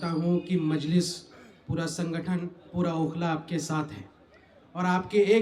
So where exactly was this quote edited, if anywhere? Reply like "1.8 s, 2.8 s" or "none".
none